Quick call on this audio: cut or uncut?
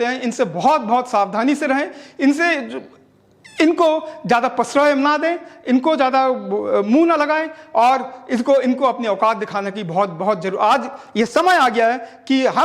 uncut